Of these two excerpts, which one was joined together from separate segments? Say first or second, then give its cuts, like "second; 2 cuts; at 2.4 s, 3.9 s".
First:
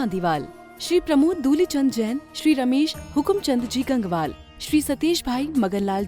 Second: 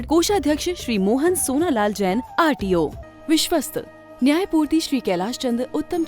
second; 1 cut; at 3.0 s